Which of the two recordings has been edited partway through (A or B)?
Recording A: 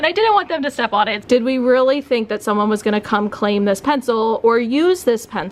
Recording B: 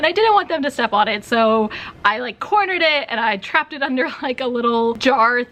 A